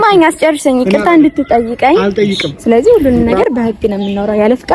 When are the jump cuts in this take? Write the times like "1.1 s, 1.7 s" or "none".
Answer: 2.5 s